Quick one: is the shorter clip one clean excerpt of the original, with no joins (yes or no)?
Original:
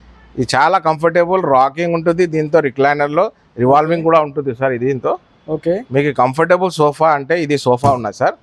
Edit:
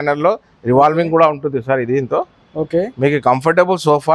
yes